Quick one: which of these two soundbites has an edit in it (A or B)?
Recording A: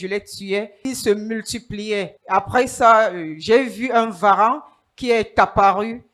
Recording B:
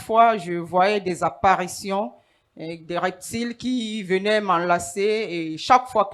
A